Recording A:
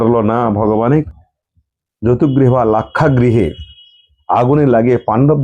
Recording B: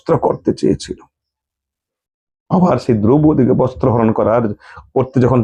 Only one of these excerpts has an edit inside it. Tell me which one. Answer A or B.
A